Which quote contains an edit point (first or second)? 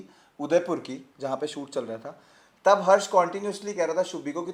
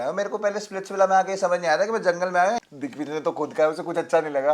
second